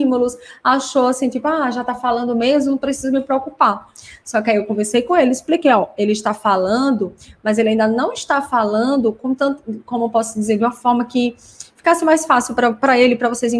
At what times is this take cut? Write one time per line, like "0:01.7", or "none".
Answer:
none